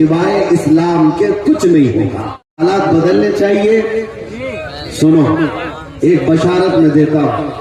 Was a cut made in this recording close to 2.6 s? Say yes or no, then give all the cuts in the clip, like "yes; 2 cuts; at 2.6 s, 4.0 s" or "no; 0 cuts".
yes; 1 cut; at 2.6 s